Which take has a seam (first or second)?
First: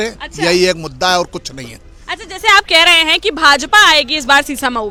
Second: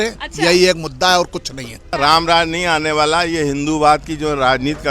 second